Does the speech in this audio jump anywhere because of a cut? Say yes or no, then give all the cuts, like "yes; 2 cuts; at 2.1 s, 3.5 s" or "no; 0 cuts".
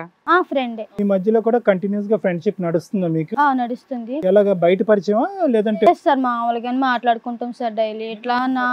no; 0 cuts